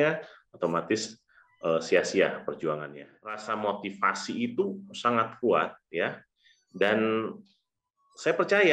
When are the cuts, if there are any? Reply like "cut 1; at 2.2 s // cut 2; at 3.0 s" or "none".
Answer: cut 1; at 3.4 s